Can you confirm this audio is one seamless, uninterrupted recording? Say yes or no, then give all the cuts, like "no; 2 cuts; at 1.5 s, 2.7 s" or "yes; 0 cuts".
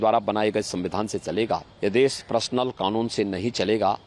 no; 1 cut; at 1.7 s